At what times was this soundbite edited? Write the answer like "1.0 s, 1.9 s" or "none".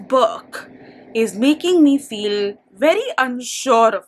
none